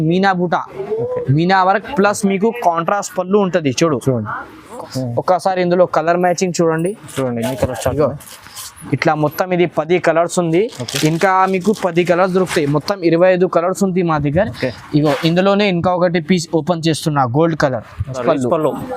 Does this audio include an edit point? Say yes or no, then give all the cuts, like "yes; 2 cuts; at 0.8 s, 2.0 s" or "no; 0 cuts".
yes; 2 cuts; at 4.8 s, 18.2 s